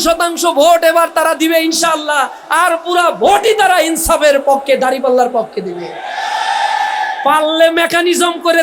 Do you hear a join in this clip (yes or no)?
no